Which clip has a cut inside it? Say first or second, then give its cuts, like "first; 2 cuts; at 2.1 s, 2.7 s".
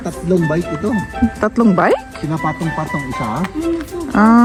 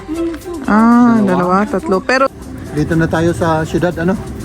second; 1 cut; at 2.3 s